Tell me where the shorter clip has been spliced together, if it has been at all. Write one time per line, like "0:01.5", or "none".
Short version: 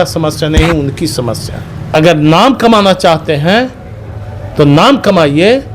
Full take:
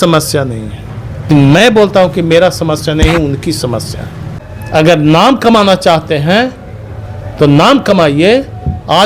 0:01.9

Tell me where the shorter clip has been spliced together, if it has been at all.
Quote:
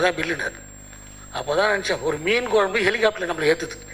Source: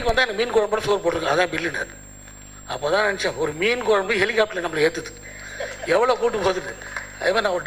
none

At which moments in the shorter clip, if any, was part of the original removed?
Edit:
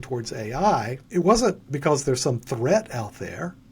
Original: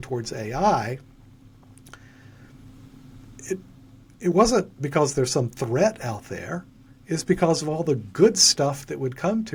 0:01.0

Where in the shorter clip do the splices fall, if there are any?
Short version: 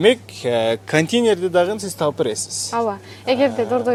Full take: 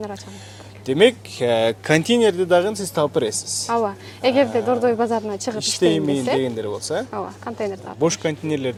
none

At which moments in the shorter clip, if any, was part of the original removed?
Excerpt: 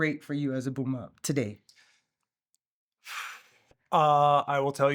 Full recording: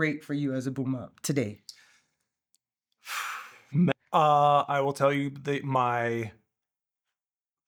0:03.8

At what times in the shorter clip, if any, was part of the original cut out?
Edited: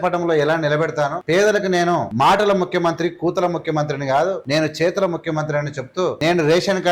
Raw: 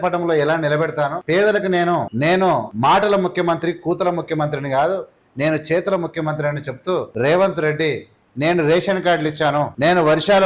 0:02.1
0:04.4
0:06.2

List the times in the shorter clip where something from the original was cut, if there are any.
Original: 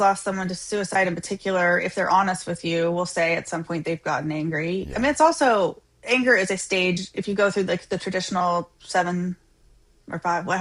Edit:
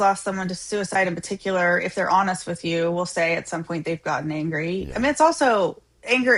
none

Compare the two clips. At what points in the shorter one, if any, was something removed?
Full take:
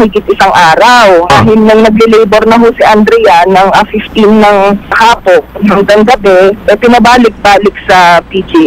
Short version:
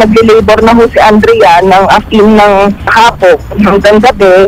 0:02.0

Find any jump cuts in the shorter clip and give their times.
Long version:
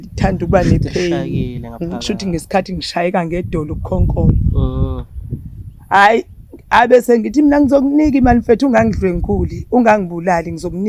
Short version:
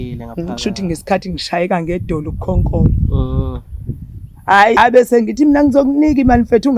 0:04.8

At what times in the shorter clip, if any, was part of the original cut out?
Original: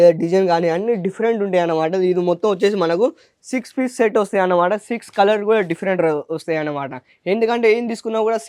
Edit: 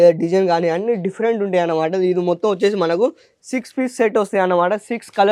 none

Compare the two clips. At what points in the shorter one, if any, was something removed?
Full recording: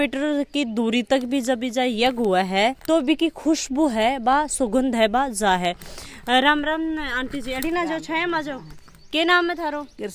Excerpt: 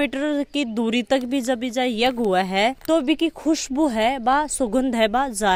none

